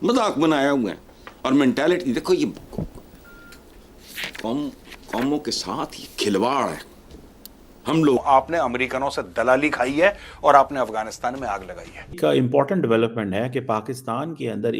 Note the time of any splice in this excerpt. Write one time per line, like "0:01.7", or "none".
0:08.2
0:12.1